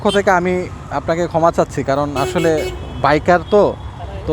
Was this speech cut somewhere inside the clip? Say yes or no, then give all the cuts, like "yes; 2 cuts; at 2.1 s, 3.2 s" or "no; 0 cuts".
no; 0 cuts